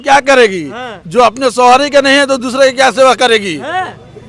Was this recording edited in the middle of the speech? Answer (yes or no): no